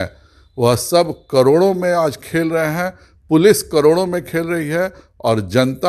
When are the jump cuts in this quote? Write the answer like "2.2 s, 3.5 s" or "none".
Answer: none